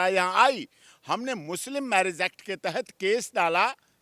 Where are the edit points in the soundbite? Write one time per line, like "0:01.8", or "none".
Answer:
none

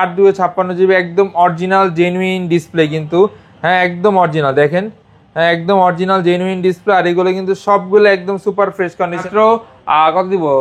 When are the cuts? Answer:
0:09.2

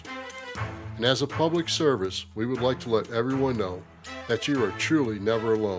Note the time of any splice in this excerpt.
0:02.2

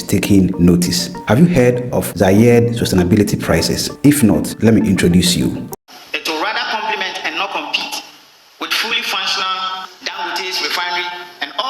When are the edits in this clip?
0:05.6

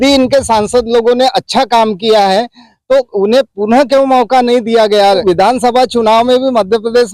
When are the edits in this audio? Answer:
0:05.0

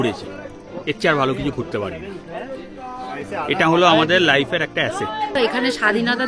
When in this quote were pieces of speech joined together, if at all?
0:05.4

